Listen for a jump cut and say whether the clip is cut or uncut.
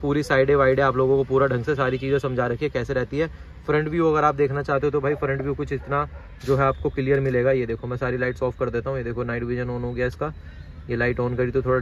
uncut